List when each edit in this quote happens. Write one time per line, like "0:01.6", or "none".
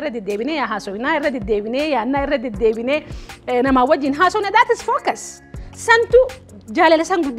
none